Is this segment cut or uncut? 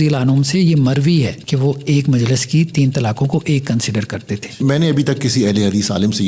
cut